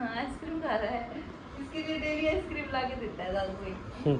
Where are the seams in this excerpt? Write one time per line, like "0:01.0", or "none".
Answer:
none